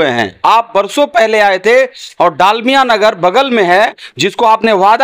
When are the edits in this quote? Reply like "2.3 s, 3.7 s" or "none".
none